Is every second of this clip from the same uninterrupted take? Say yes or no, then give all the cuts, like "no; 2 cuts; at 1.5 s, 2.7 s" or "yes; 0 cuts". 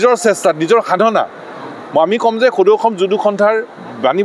yes; 0 cuts